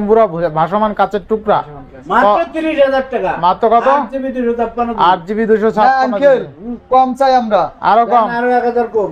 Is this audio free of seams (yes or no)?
yes